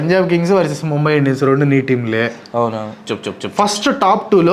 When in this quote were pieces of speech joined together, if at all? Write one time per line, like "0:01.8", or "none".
0:03.0